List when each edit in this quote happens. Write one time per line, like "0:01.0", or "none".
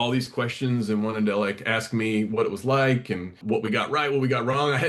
0:03.4